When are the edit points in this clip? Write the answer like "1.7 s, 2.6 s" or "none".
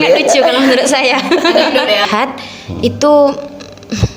2.1 s